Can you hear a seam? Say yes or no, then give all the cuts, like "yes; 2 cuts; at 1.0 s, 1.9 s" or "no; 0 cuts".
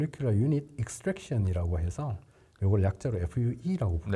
no; 0 cuts